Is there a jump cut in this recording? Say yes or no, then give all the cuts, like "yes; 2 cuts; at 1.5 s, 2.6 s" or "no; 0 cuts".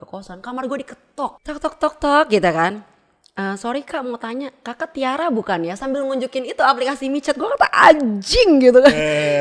yes; 1 cut; at 1.4 s